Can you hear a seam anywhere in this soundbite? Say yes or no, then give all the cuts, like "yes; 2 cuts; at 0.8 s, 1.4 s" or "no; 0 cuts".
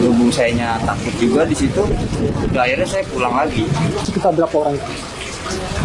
yes; 1 cut; at 4.1 s